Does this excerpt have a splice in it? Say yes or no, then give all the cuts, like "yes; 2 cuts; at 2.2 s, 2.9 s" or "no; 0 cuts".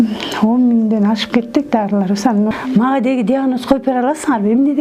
yes; 1 cut; at 2.5 s